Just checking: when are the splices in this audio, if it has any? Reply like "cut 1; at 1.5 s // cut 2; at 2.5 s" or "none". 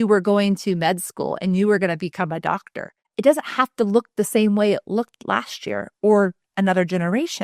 cut 1; at 3.1 s